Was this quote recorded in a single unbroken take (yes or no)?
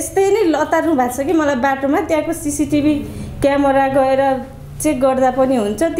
yes